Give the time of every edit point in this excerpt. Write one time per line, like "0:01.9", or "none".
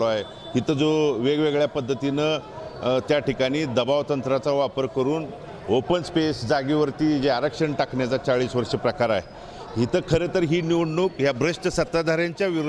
none